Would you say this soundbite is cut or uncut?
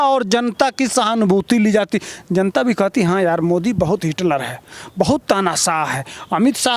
uncut